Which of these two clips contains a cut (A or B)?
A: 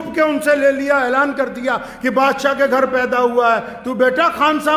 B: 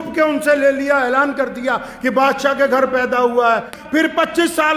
B